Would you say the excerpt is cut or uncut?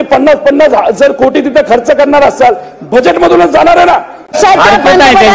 cut